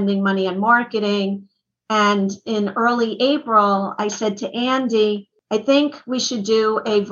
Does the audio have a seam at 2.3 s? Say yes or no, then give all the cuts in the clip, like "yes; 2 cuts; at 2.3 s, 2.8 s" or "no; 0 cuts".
no; 1 cut; at 5.3 s